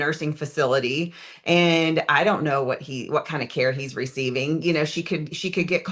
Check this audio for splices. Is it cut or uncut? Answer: uncut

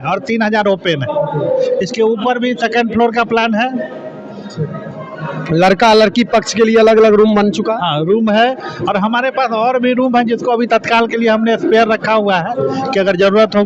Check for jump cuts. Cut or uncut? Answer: uncut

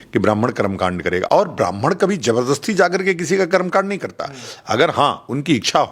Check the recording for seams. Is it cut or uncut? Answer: uncut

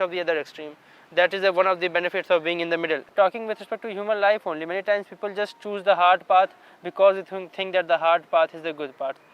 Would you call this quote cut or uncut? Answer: cut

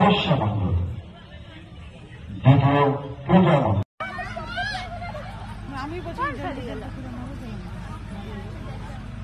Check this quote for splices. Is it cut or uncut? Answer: uncut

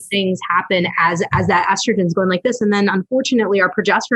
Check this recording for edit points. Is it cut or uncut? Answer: uncut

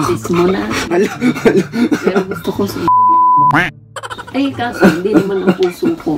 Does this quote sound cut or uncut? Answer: uncut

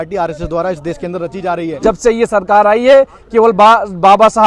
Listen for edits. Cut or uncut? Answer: cut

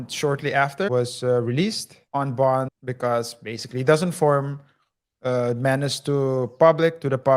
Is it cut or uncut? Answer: cut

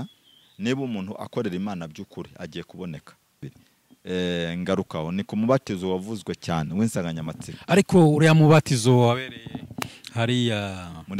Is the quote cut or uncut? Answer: cut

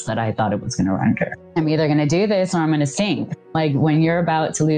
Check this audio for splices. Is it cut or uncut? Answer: cut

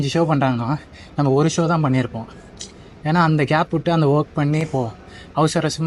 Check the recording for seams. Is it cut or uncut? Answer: uncut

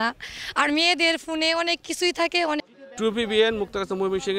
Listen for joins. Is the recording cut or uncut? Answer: cut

